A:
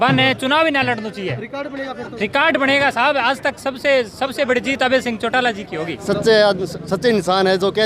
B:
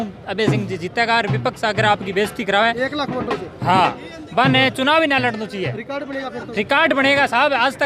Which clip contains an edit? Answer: A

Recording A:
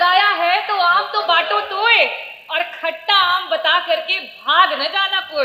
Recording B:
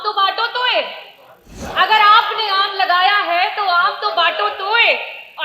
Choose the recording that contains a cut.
B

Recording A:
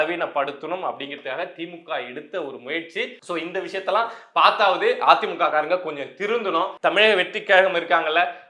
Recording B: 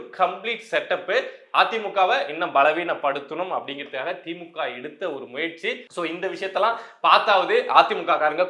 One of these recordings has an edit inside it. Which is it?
A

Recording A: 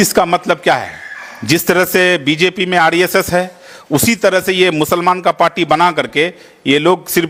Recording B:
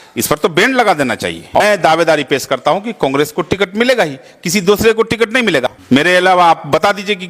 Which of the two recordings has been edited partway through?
B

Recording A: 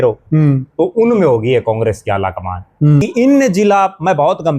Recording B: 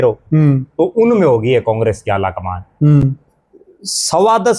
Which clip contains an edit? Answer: A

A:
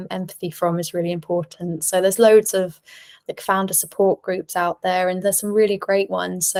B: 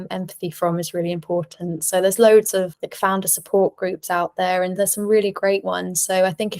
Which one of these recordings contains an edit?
B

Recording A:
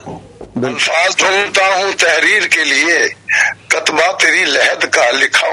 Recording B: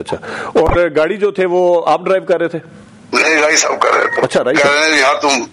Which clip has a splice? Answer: B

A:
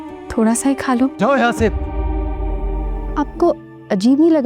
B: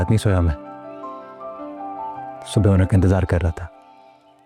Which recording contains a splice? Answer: A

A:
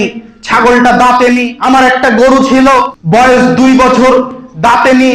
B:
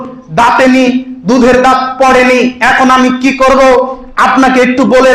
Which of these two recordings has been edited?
A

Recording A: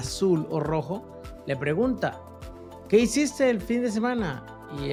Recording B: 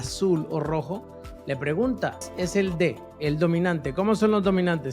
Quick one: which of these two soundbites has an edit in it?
B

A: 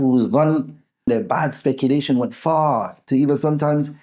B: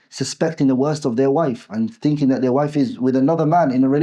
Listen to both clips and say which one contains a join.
A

